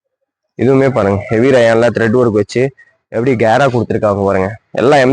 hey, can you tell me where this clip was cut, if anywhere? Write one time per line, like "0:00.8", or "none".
none